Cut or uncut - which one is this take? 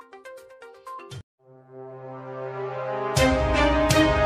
uncut